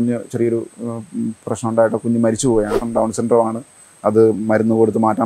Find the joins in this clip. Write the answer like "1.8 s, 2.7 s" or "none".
2.7 s